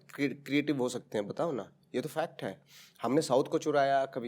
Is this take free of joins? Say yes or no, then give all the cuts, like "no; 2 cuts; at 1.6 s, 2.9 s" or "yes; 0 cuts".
yes; 0 cuts